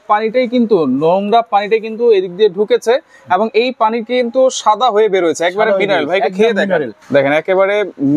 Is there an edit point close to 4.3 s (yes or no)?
no